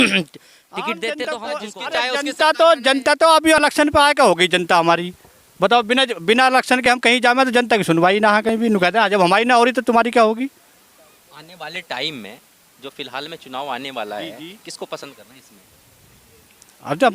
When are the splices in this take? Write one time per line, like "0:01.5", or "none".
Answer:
0:01.2